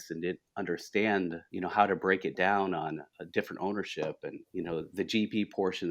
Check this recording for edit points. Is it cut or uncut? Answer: cut